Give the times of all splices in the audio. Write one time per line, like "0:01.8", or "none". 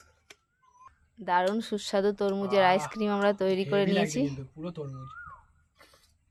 none